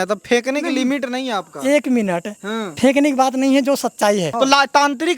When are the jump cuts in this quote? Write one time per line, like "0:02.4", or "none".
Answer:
0:04.3